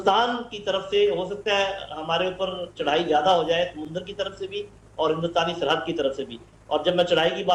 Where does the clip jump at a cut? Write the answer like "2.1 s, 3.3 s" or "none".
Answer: none